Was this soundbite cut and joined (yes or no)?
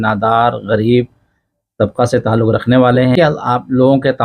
yes